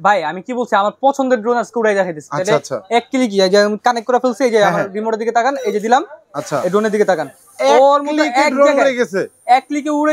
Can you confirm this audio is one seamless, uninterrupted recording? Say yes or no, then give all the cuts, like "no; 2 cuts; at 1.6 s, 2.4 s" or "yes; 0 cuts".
yes; 0 cuts